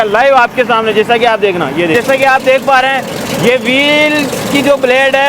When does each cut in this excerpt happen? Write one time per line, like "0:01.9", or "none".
0:01.9